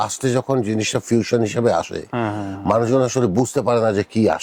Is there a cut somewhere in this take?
no; 0 cuts

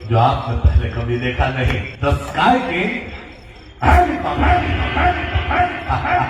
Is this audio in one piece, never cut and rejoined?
no; 1 cut; at 1.9 s

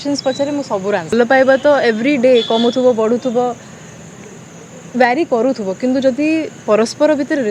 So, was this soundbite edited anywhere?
yes; 1 cut; at 1.1 s

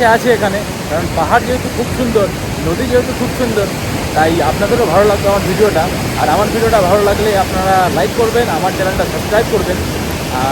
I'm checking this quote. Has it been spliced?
no; 0 cuts

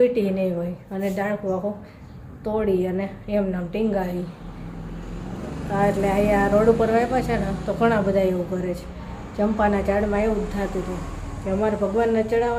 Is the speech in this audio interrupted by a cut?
no; 0 cuts

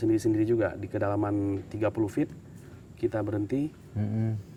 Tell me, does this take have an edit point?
no; 0 cuts

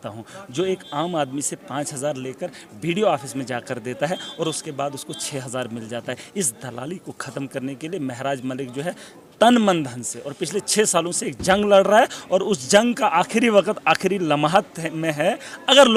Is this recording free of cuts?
yes; 0 cuts

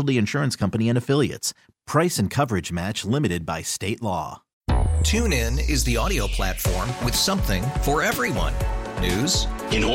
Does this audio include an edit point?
yes; 1 cut; at 4.4 s

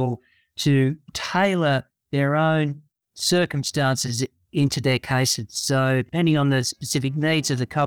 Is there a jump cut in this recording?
yes; 2 cuts; at 1.1 s, 6.1 s

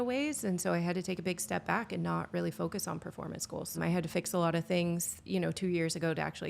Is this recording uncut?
no; 2 cuts; at 3.8 s, 5.2 s

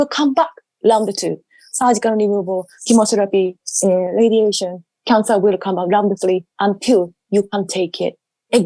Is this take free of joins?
yes; 0 cuts

